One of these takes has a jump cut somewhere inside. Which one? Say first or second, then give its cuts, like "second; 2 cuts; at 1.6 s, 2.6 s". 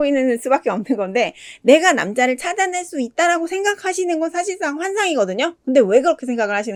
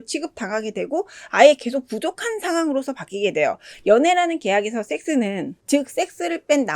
second; 1 cut; at 5.5 s